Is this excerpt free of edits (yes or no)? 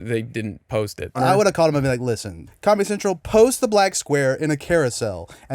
no